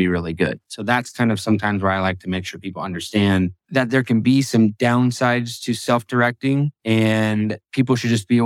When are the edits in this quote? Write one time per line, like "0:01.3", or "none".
0:03.6
0:04.8
0:06.7
0:07.6